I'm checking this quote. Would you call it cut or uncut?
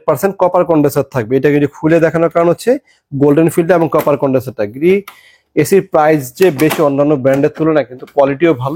uncut